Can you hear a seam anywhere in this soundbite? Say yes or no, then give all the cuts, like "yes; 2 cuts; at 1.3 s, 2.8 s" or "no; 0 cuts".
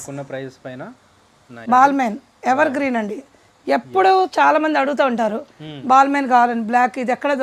yes; 1 cut; at 1.6 s